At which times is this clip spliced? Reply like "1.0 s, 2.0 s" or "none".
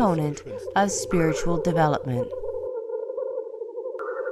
none